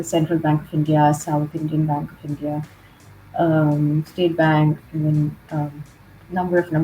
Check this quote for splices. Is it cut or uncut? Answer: uncut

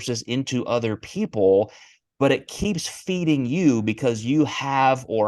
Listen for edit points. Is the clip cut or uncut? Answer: uncut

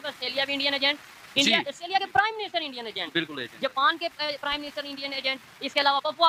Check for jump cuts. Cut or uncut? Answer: uncut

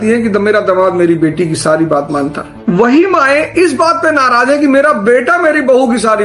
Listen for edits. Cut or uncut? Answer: uncut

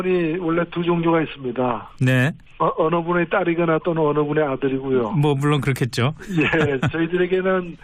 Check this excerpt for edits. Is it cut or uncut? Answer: cut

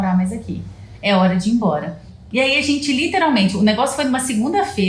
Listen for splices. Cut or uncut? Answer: cut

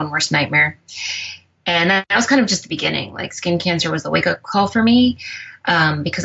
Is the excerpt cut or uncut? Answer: uncut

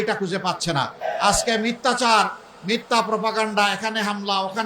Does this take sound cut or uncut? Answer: cut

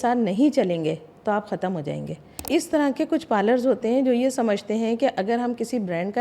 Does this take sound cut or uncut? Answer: cut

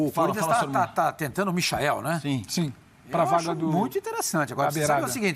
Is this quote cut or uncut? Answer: uncut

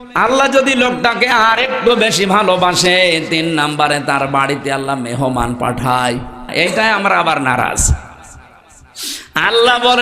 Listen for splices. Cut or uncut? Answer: cut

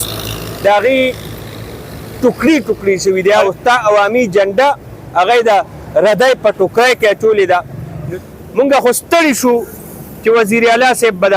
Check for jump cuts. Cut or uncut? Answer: cut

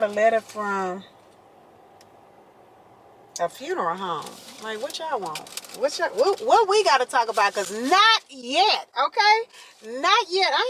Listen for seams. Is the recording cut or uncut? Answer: uncut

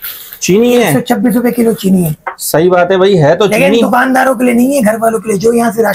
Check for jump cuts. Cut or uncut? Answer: uncut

